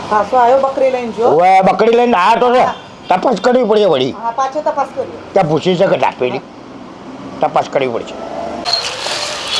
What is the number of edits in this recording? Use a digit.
1